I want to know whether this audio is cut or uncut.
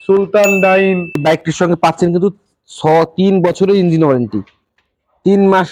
cut